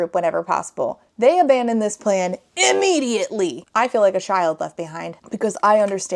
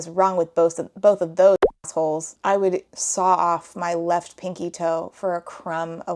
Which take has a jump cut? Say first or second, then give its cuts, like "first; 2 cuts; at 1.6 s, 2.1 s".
first; 1 cut; at 3.6 s